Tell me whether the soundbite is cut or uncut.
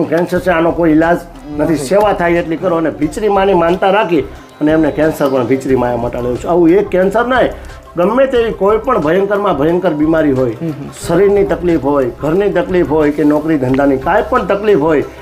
uncut